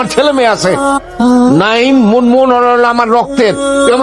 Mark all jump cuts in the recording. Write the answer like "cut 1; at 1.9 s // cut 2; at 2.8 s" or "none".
cut 1; at 1.1 s